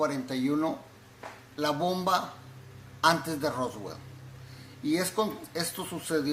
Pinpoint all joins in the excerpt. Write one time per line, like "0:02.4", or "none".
0:00.9